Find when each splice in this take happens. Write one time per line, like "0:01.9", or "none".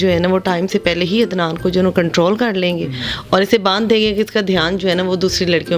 none